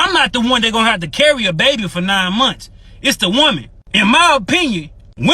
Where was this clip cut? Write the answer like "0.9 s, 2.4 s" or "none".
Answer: 3.3 s